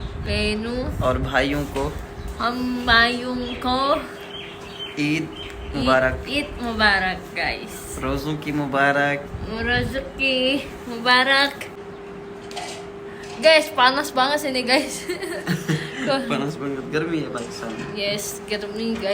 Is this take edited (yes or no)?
yes